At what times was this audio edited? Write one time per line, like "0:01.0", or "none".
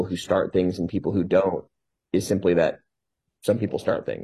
none

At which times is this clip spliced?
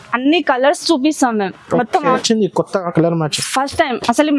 0:02.2

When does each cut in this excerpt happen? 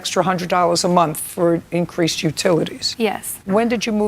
0:03.1

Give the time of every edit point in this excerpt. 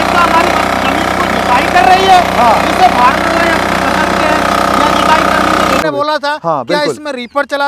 0:05.8

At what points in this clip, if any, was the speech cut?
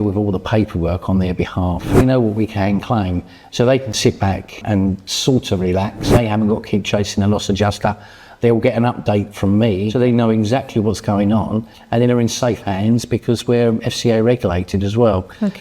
0:02.0
0:04.6
0:06.1
0:09.9

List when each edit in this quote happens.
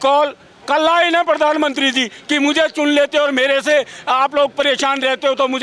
none

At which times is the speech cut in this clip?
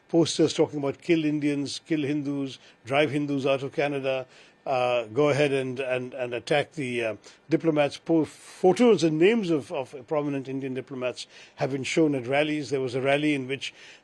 none

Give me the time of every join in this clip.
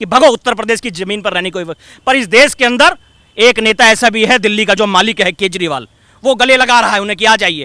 none

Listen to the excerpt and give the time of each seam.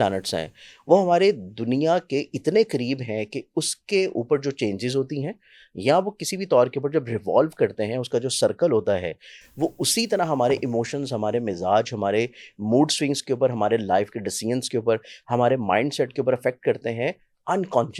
none

